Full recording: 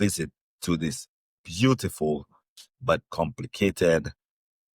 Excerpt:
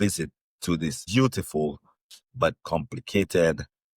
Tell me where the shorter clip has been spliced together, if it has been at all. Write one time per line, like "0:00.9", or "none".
0:01.0